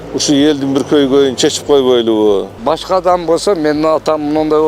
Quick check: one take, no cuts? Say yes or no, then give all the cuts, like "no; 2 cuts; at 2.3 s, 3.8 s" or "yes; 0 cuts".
no; 1 cut; at 2.6 s